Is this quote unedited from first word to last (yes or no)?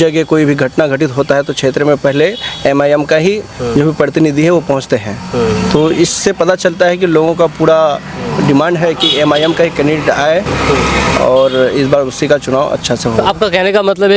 yes